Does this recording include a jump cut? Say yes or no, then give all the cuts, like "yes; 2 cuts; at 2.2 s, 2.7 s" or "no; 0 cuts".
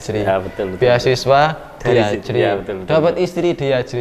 no; 0 cuts